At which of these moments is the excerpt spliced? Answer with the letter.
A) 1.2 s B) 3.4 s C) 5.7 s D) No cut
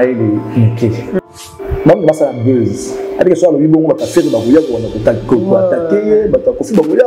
A